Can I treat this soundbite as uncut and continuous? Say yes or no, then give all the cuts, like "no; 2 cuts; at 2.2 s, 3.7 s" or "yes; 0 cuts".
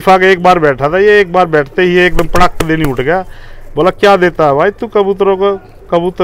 yes; 0 cuts